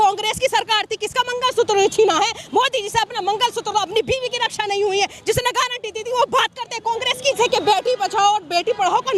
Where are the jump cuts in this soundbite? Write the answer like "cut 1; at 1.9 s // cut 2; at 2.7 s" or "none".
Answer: cut 1; at 7.4 s